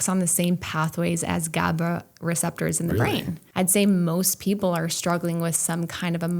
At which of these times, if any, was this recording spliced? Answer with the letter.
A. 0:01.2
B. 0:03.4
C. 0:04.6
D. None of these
B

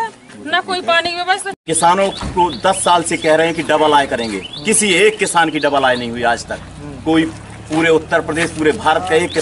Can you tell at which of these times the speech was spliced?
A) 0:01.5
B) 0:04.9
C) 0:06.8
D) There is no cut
A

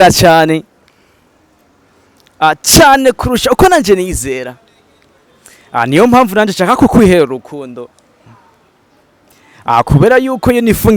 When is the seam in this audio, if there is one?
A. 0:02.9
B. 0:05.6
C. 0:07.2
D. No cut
D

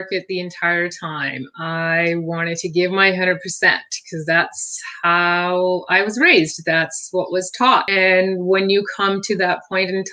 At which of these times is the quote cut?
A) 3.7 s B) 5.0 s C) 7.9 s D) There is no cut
C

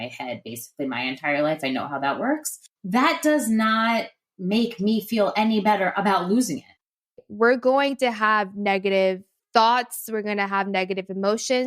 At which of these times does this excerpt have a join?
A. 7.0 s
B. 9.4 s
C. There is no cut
A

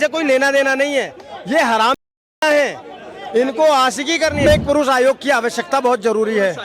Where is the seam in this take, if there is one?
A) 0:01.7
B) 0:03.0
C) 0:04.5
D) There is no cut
C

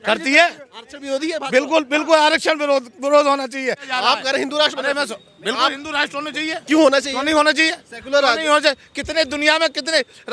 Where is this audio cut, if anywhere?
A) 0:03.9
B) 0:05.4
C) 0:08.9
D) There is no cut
A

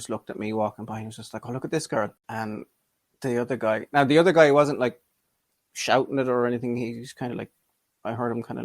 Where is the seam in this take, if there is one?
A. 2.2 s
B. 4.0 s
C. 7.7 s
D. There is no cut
A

